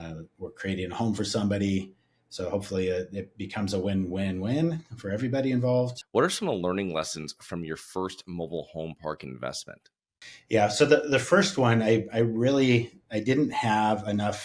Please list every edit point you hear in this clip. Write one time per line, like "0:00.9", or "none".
0:06.0